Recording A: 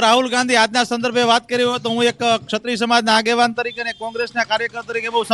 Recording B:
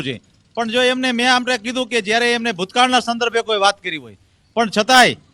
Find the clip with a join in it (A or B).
A